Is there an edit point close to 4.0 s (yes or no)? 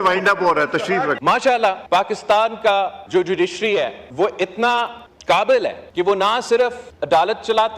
yes